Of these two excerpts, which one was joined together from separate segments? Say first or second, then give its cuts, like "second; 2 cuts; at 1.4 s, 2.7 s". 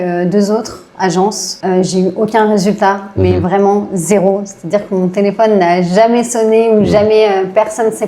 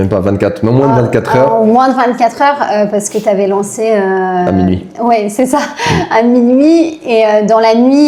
first; 1 cut; at 1.5 s